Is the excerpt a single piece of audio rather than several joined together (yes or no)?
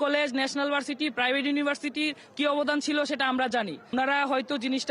no